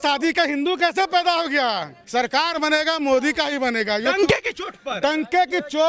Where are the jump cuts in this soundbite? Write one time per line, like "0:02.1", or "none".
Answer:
0:01.9